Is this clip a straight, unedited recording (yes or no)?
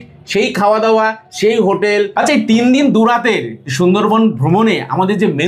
no